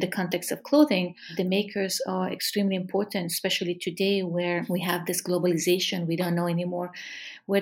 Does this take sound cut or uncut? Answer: cut